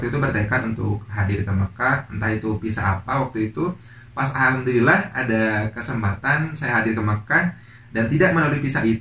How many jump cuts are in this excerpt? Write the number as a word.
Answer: zero